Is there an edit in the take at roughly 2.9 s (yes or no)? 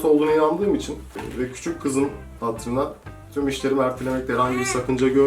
no